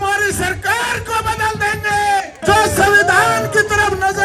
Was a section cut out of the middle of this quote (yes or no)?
yes